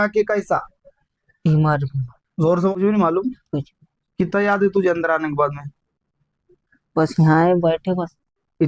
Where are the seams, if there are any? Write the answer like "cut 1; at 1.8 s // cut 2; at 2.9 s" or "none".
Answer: cut 1; at 2.7 s